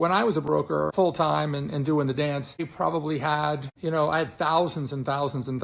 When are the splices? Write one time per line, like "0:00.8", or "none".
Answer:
0:00.9
0:02.7
0:03.7